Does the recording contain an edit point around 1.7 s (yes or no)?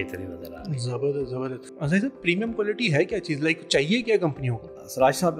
yes